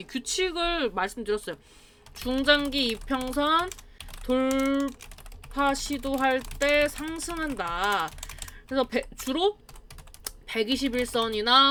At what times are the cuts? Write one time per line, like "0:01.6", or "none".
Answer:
none